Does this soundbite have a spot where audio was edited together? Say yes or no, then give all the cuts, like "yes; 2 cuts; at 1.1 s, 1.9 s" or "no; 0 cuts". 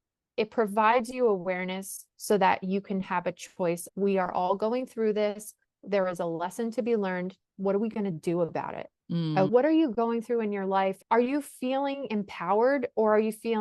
yes; 3 cuts; at 3.8 s, 9.5 s, 11.0 s